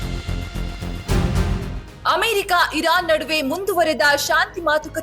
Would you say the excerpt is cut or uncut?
uncut